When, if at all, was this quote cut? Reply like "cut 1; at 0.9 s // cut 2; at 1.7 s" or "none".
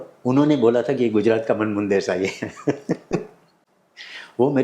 none